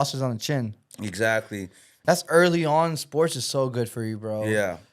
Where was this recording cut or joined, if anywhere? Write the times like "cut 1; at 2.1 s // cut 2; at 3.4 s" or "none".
cut 1; at 1.9 s